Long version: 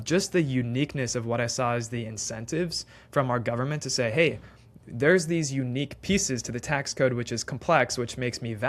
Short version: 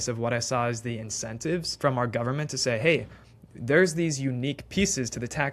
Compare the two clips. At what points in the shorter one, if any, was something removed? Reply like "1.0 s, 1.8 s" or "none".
1.7 s